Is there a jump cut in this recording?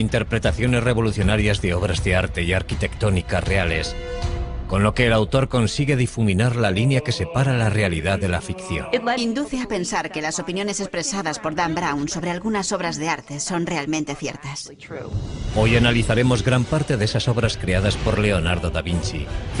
yes; 1 cut; at 3.5 s

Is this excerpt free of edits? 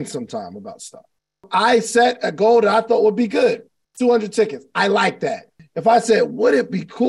no; 2 cuts; at 1.5 s, 5.5 s

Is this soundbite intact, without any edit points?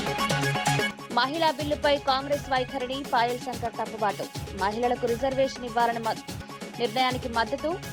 no; 1 cut; at 0.9 s

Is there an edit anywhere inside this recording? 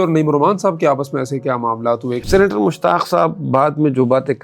yes; 1 cut; at 2.2 s

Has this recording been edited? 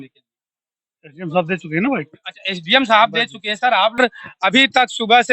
yes; 1 cut; at 4.0 s

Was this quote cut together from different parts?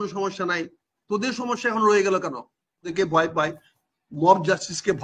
yes; 1 cut; at 2.9 s

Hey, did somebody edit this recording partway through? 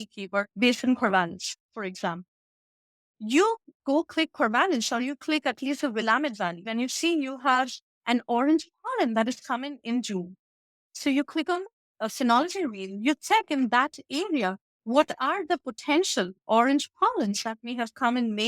yes; 1 cut; at 6.7 s

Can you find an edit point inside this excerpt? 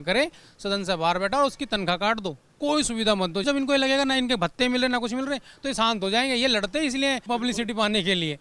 yes; 2 cuts; at 3.4 s, 7.2 s

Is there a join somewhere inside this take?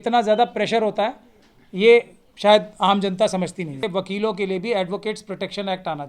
yes; 1 cut; at 3.8 s

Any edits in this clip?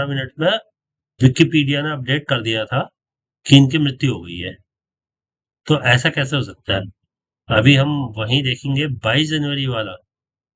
no; 0 cuts

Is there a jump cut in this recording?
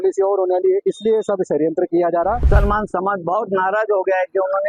yes; 1 cut; at 2.4 s

